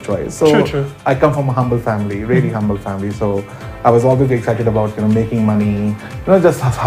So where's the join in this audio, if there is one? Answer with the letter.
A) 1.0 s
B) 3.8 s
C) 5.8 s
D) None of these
A